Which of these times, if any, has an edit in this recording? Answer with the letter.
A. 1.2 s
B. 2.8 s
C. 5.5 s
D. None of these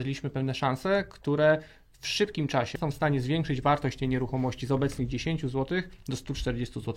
B